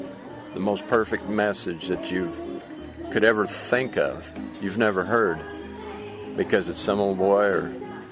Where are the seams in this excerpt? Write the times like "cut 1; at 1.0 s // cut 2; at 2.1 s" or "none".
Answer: none